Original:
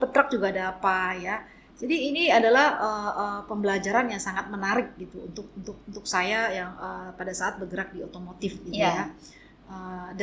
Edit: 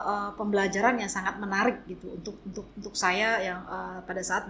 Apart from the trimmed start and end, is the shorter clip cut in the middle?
no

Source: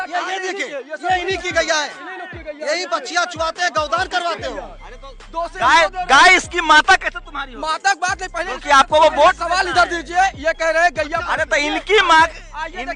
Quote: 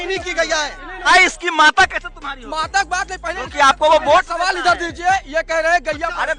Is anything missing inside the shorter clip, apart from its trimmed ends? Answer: yes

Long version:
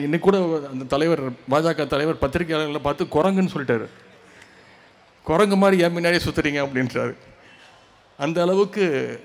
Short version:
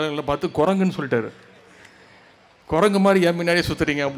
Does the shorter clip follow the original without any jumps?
yes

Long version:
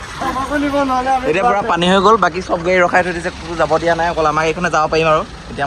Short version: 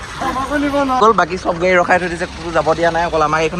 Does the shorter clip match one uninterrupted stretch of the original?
no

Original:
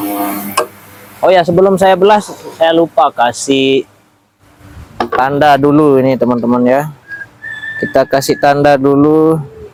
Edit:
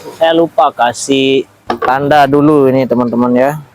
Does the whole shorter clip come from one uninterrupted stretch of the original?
no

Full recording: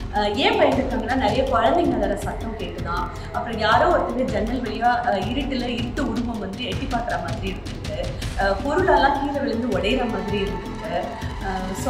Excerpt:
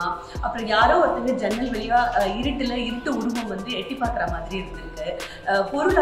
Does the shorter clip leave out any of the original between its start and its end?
no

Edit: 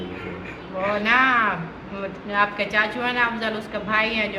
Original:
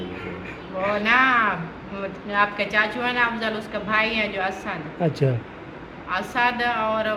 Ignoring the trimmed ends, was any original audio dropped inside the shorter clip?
no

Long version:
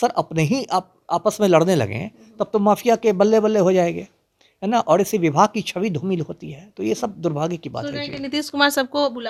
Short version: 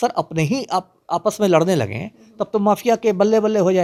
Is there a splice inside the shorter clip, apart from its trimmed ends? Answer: no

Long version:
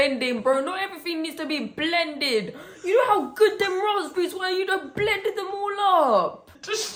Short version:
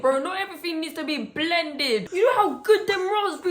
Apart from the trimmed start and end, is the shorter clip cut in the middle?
yes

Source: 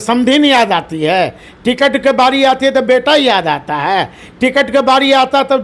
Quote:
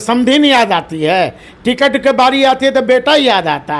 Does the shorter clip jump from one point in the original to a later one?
no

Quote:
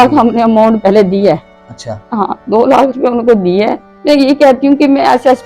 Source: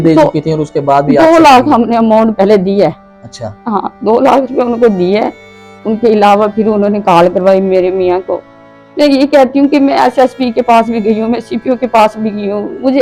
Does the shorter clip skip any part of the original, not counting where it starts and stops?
yes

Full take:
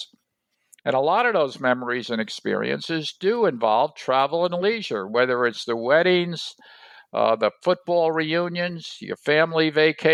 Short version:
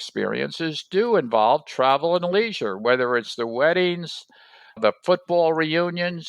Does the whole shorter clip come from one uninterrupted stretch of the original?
no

